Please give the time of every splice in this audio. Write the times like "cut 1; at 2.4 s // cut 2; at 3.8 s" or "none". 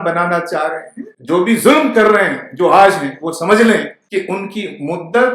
cut 1; at 1.2 s // cut 2; at 4.0 s